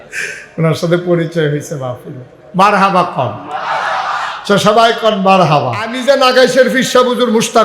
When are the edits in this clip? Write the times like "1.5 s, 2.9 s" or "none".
5.9 s